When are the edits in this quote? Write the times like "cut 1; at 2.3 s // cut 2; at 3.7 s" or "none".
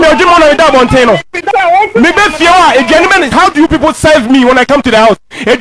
cut 1; at 1.4 s